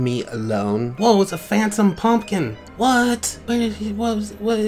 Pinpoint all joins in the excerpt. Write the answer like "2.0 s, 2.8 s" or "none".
0.9 s, 2.6 s, 3.3 s

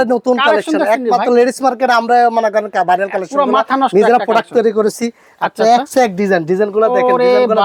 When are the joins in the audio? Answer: none

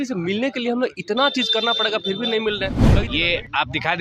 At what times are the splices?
2.9 s

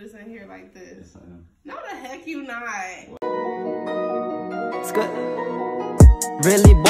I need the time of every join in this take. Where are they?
3.2 s

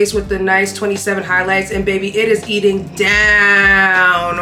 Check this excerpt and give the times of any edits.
none

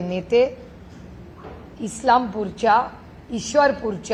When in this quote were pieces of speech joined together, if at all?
none

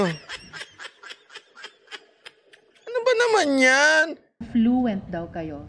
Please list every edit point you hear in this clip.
4.5 s

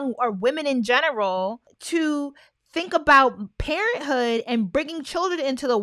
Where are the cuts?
1.7 s

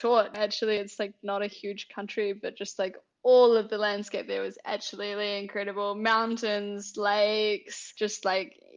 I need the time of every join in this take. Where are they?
none

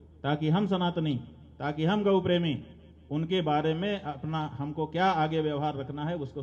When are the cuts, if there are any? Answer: none

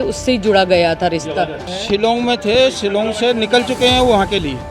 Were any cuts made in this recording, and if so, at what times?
1.6 s

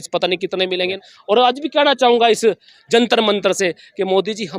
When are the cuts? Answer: 1.1 s

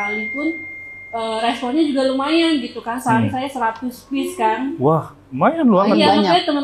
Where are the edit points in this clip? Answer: none

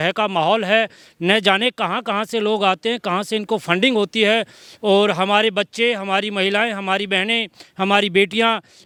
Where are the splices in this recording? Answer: none

